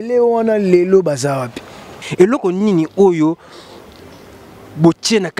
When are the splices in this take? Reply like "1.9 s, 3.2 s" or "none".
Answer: 2.0 s

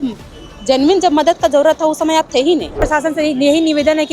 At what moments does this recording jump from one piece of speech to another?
2.8 s

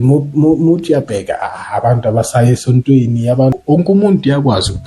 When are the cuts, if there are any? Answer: 3.6 s

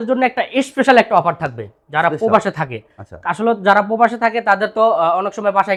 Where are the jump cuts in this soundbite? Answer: none

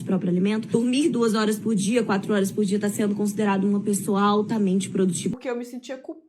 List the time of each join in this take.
5.3 s

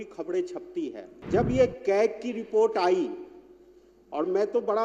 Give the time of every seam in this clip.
1.1 s

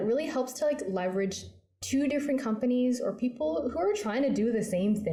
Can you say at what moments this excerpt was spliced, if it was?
none

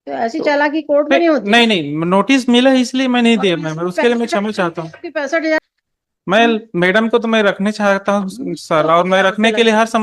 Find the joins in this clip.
5.6 s

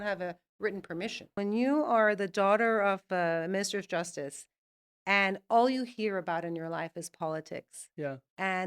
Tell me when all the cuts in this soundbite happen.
1.3 s

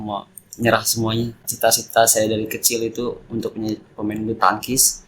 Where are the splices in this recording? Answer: 1.5 s

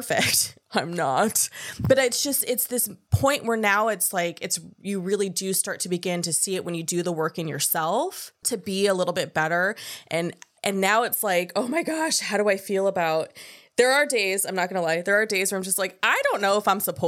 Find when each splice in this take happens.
3.0 s

